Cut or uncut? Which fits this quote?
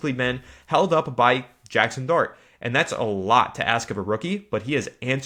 uncut